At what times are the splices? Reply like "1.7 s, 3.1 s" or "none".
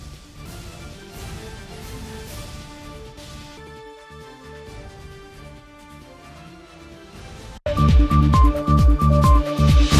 none